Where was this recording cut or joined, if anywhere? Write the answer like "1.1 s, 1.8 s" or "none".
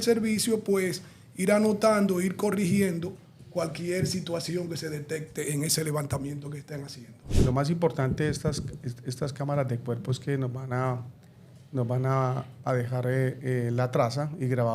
7.3 s